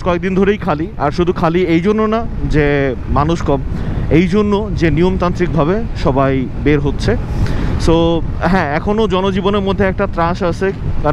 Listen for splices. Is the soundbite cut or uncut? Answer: uncut